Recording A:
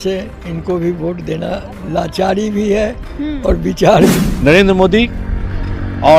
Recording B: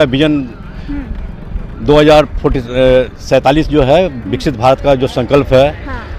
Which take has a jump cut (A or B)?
A